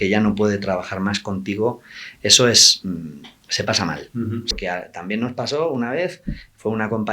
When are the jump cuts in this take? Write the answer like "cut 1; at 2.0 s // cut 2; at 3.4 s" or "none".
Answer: cut 1; at 4.5 s